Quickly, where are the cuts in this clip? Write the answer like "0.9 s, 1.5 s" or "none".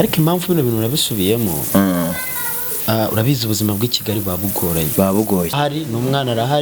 5.6 s